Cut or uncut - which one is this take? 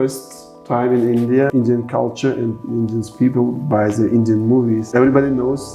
cut